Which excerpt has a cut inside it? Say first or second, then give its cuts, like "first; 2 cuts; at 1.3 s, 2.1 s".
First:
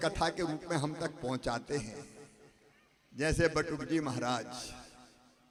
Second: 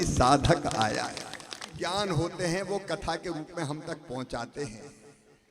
second; 1 cut; at 1.7 s